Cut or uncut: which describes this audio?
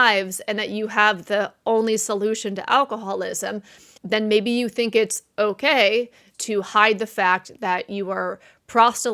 cut